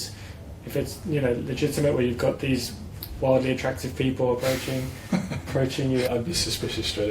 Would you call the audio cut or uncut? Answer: cut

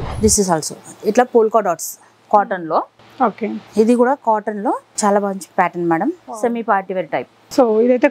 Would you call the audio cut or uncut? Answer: uncut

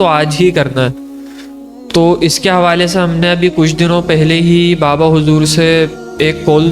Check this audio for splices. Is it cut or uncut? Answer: uncut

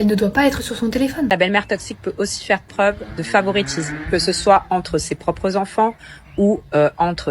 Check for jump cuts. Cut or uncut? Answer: cut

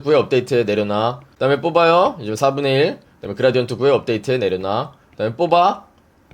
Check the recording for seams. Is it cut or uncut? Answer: cut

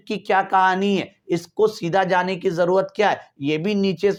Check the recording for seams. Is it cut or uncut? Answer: uncut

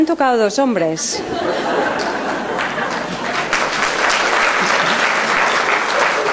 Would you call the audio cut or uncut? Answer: cut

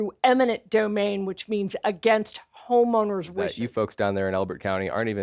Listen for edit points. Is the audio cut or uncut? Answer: cut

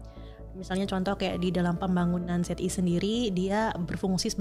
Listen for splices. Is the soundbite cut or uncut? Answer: uncut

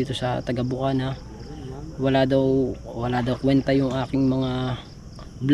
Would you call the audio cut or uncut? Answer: uncut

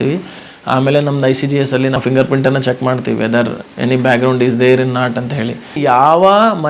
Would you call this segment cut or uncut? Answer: cut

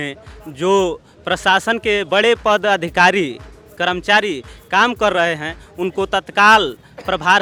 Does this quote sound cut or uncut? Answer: uncut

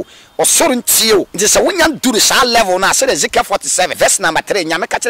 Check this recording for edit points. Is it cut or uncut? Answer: cut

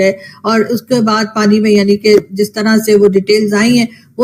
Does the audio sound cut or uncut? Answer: uncut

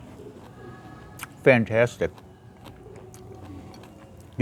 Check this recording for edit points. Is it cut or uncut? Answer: uncut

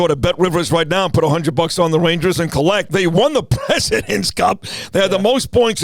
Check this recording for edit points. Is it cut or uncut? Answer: cut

